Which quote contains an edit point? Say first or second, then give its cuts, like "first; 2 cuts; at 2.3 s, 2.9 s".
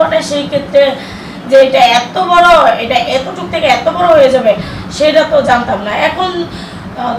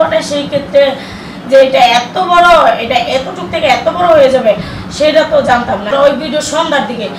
second; 1 cut; at 5.9 s